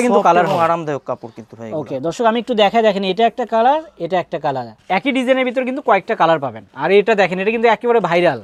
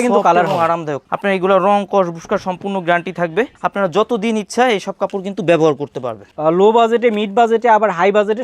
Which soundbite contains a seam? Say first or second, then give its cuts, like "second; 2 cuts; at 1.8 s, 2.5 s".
second; 2 cuts; at 1.0 s, 6.3 s